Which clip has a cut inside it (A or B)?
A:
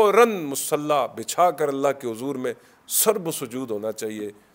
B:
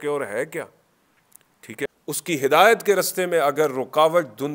B